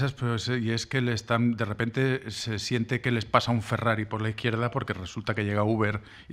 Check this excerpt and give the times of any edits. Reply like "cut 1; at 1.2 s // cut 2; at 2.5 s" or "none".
cut 1; at 4.2 s